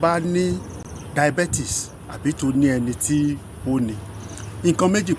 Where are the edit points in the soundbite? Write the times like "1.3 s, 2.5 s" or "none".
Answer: 0.9 s